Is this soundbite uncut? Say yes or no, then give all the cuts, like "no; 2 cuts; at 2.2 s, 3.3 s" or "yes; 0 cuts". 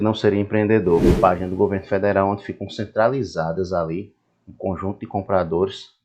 no; 1 cut; at 1.1 s